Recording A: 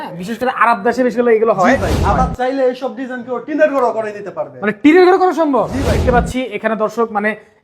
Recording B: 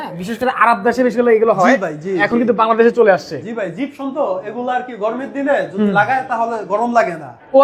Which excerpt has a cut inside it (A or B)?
A